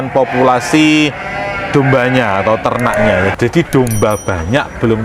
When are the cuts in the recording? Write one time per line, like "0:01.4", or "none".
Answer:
0:03.3